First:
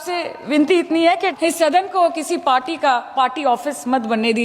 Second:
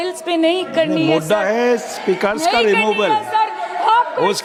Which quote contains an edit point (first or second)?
first